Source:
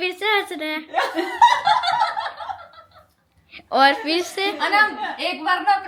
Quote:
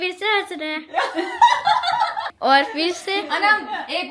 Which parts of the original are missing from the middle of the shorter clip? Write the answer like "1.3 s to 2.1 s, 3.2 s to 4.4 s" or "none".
2.3 s to 3.6 s